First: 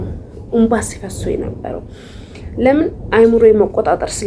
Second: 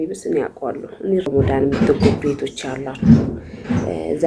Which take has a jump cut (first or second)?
second